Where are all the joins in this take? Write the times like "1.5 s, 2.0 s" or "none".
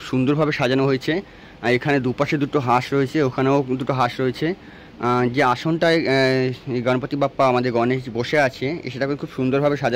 none